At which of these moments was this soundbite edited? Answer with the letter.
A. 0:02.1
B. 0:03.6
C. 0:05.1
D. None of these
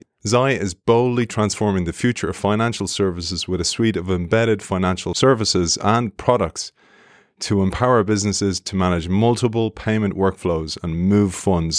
C